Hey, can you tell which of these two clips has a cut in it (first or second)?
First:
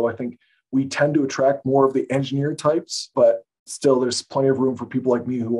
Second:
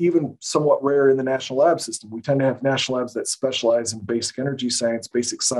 first